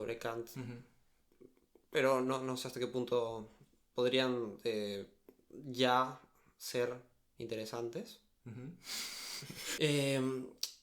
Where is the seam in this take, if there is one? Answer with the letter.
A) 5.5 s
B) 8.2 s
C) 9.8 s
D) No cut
C